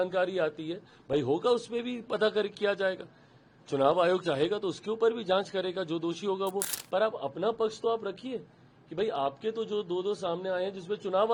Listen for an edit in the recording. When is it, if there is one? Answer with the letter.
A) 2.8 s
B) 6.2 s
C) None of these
C